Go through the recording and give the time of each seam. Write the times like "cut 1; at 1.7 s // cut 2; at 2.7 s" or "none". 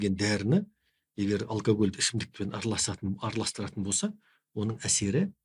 none